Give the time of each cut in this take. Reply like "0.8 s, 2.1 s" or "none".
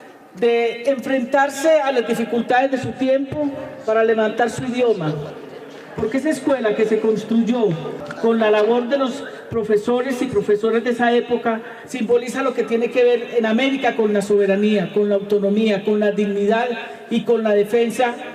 none

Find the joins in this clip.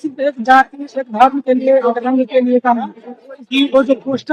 3.3 s

